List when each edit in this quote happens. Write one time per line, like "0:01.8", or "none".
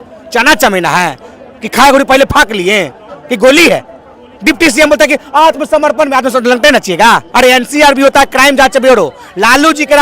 0:07.3